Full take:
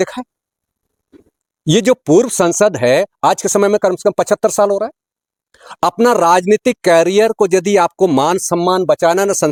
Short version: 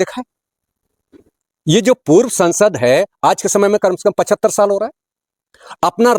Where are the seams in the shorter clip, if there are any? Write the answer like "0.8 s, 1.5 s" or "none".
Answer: none